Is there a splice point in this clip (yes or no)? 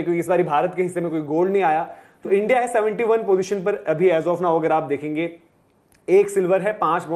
no